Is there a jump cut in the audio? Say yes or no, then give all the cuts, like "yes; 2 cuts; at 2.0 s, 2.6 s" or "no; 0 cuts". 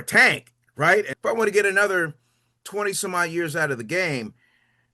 yes; 1 cut; at 1.1 s